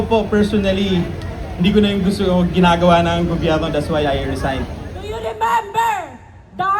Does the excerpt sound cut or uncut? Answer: cut